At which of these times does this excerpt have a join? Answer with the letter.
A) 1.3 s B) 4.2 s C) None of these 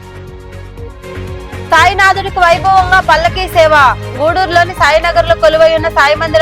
A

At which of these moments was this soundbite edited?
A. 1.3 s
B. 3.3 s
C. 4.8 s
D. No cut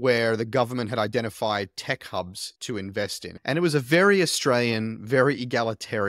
B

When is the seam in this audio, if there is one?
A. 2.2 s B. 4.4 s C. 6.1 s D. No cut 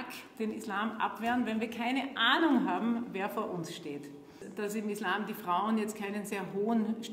B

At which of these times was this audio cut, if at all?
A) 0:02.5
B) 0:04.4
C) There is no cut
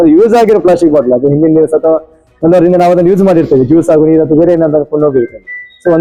C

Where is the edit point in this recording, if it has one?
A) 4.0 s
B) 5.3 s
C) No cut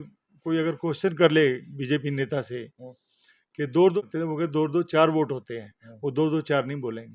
A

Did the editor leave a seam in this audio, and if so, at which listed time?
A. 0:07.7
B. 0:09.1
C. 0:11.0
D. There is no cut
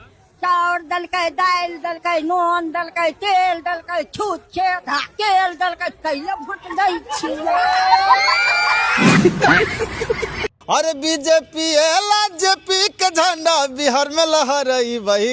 B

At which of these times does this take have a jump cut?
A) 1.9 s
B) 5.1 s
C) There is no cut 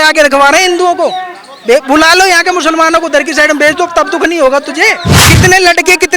B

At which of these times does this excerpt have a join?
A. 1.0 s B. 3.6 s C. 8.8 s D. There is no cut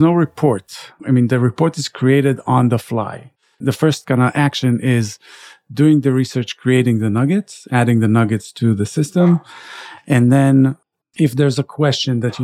B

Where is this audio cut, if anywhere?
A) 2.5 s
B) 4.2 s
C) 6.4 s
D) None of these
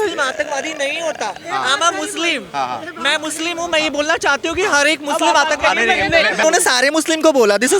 C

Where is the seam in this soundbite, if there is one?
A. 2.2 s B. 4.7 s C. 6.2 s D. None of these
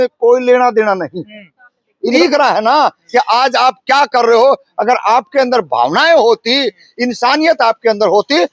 A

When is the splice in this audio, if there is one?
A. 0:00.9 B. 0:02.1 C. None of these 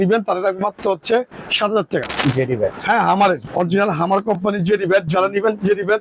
B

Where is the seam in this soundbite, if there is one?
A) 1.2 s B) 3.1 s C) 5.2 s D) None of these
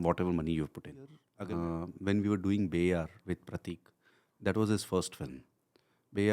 A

